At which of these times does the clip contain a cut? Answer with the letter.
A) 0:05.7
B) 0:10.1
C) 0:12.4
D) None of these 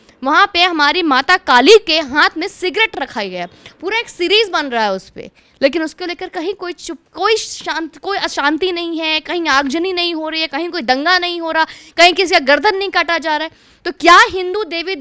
D